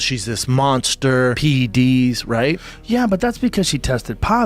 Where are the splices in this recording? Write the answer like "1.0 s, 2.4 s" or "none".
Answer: 1.4 s